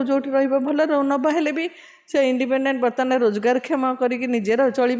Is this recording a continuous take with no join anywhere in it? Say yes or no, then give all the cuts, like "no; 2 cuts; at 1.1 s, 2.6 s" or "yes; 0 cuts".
yes; 0 cuts